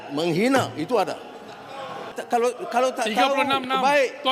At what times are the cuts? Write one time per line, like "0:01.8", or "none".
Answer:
0:02.1